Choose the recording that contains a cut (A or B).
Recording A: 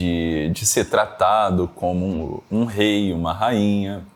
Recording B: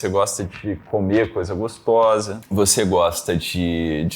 B